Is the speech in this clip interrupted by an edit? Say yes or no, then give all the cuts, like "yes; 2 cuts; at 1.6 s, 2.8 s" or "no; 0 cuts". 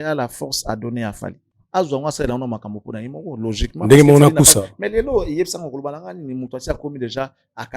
no; 0 cuts